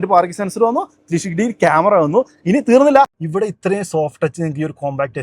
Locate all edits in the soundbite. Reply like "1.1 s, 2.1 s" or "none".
3.2 s